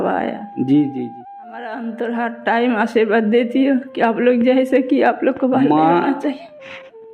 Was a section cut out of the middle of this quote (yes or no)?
yes